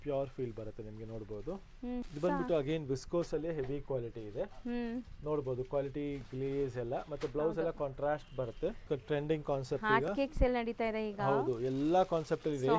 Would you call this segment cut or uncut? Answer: cut